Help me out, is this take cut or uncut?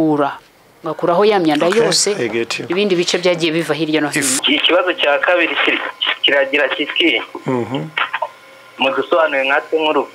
cut